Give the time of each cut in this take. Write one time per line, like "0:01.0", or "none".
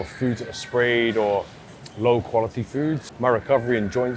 0:03.1